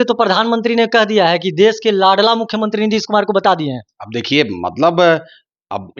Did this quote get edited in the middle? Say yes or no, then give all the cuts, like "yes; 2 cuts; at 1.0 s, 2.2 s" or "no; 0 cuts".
no; 0 cuts